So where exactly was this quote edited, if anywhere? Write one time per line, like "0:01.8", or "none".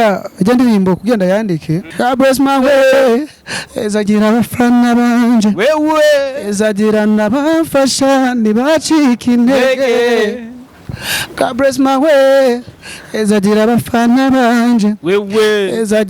0:01.9